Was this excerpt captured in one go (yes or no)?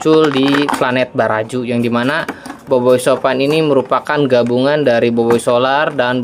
yes